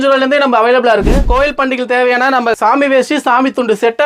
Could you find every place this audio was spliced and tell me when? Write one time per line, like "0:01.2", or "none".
0:01.2